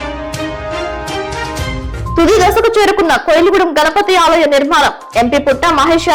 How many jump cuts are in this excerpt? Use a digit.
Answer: 0